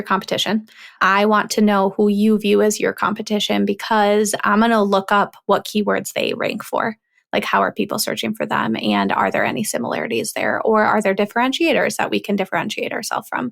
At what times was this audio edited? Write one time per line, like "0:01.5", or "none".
none